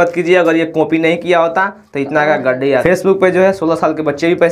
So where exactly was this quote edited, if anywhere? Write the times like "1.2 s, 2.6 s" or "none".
2.8 s